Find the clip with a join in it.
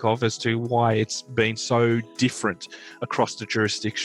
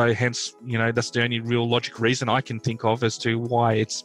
second; 1 cut; at 1.9 s

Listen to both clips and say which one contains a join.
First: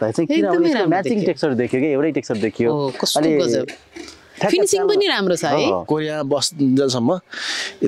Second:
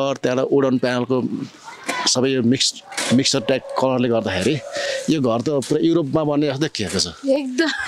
first; 1 cut; at 5.8 s

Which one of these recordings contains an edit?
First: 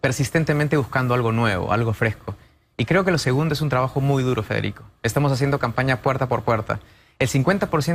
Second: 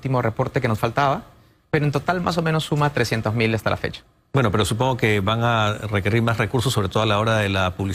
second; 1 cut; at 3.2 s

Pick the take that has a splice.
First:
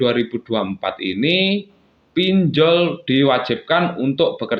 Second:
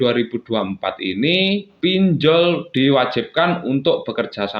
second; 1 cut; at 1.7 s

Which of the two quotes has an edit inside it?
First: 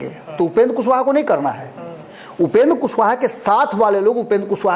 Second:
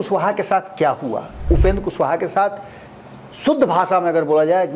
second; 1 cut; at 1.3 s

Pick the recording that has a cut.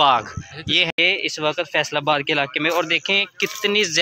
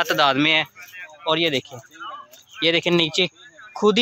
first; 1 cut; at 1.0 s

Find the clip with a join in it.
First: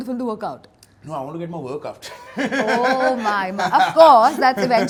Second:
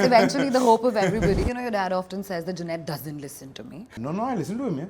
second; 2 cuts; at 1.4 s, 3.9 s

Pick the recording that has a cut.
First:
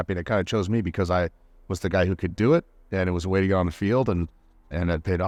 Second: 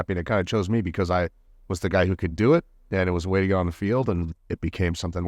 second; 1 cut; at 4.4 s

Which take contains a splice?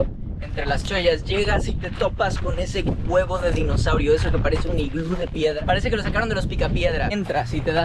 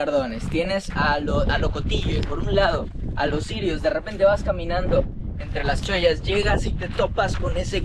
first; 2 cuts; at 5.6 s, 7.1 s

